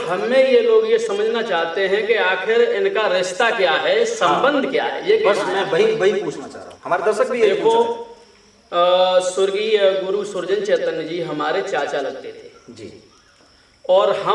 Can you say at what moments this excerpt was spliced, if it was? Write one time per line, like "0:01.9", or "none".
none